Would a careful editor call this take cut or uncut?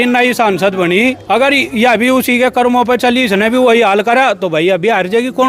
uncut